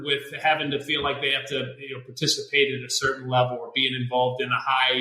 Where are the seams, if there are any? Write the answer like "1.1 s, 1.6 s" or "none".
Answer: none